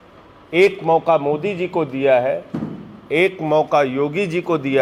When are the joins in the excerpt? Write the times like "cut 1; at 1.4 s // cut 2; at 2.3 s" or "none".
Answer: none